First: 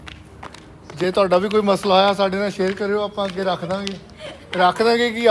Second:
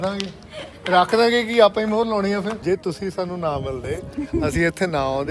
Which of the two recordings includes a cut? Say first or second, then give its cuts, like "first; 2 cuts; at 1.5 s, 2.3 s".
second; 1 cut; at 2.6 s